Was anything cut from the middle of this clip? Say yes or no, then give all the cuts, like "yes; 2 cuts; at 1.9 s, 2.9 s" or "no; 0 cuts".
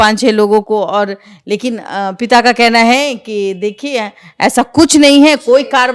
no; 0 cuts